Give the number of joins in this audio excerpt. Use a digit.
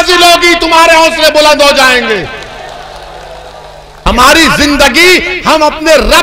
1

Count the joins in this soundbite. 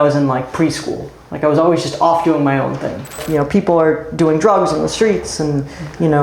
1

